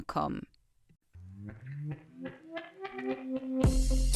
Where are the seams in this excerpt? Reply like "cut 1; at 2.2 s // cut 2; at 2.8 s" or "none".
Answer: cut 1; at 0.9 s